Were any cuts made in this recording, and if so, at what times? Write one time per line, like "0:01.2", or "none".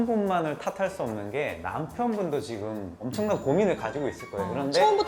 none